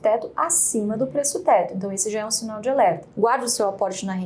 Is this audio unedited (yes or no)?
no